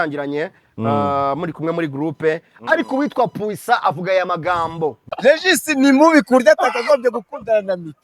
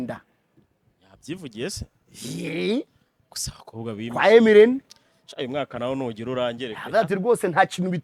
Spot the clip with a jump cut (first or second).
first